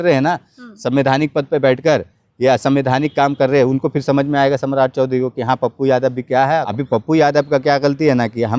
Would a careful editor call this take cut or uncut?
cut